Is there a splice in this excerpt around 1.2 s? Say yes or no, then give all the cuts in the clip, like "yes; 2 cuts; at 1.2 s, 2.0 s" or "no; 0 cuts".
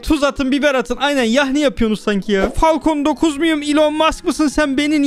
no; 1 cut; at 2.5 s